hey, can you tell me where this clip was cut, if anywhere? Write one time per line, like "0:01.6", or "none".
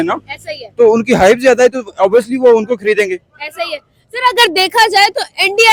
none